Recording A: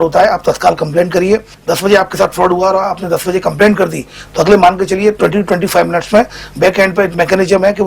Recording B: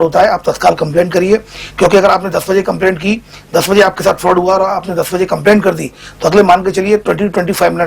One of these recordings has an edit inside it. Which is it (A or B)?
A